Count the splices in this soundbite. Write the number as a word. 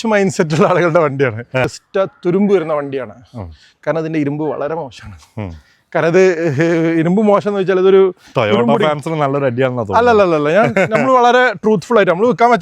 one